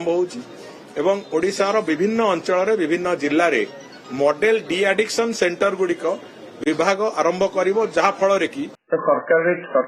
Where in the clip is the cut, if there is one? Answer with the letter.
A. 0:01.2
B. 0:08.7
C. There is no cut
B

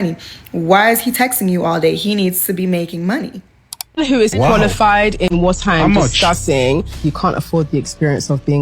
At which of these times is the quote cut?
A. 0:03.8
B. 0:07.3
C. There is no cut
A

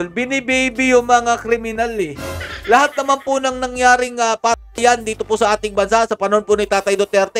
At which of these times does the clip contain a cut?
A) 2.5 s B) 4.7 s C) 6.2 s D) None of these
D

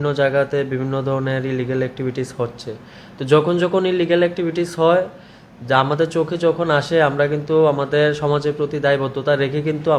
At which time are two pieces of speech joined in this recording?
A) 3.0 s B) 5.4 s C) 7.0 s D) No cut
D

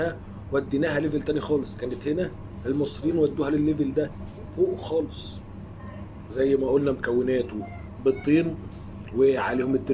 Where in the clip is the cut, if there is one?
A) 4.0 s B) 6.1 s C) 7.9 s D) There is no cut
B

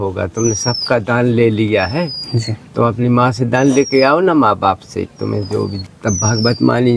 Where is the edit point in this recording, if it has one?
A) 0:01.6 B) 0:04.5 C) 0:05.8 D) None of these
C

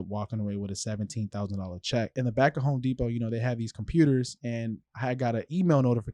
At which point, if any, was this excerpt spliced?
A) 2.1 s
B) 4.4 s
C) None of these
A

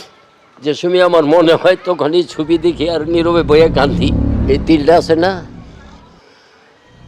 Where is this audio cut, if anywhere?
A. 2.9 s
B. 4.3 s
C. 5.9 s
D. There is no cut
B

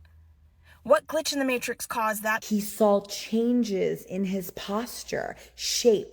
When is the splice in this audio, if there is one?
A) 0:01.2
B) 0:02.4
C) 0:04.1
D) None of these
B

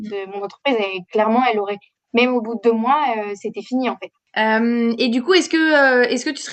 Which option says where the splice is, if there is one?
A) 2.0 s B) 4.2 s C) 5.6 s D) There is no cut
B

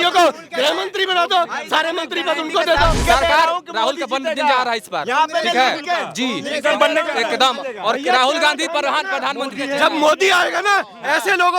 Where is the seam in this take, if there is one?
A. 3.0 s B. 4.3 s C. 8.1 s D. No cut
A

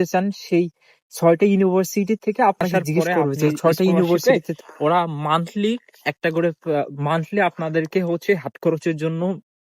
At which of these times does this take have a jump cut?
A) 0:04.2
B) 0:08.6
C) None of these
A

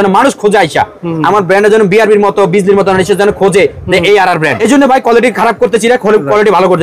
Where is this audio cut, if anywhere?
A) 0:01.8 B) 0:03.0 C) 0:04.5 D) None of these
C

